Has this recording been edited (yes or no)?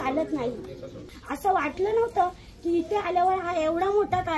yes